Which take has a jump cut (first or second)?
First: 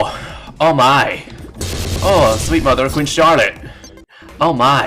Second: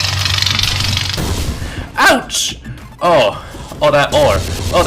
second